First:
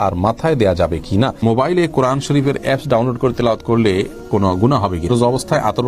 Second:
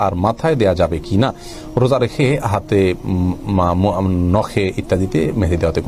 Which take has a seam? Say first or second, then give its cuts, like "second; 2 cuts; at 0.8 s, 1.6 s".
first; 2 cuts; at 1.4 s, 5.1 s